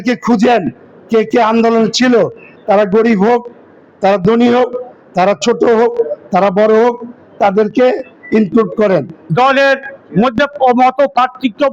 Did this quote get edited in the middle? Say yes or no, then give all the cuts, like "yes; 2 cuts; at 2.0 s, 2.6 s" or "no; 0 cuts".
yes; 3 cuts; at 2.5 s, 9.2 s, 10.0 s